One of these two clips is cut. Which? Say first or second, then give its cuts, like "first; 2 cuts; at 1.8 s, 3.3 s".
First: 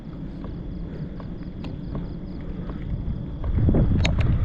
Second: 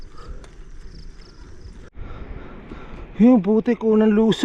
second; 1 cut; at 1.9 s